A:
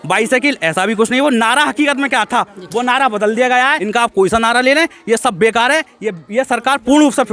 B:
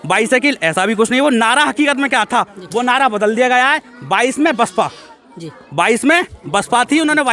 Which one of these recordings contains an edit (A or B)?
A